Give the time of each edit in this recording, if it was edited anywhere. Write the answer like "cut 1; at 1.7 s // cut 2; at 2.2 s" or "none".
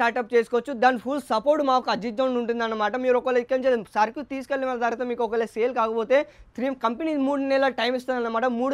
none